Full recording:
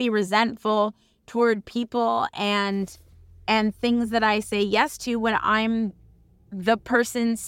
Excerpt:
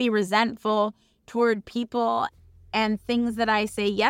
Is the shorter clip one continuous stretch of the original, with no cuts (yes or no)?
no